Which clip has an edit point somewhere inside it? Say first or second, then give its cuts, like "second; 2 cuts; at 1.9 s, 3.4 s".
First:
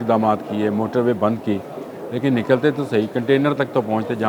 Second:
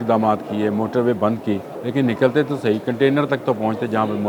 second; 1 cut; at 1.7 s